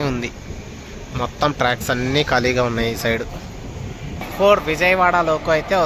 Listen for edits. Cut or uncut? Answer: cut